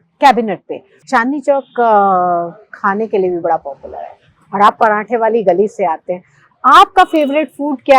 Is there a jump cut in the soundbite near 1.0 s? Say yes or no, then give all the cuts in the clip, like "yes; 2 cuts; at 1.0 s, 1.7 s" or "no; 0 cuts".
yes; 1 cut; at 1.0 s